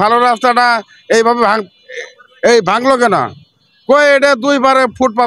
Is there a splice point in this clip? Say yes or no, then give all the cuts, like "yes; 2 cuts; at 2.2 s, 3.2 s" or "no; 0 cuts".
no; 0 cuts